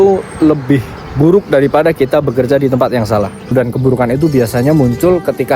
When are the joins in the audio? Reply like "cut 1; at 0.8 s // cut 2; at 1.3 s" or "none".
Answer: cut 1; at 3.5 s